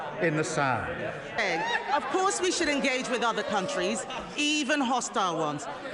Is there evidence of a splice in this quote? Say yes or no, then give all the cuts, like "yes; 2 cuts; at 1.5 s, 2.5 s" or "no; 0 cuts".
yes; 1 cut; at 1.4 s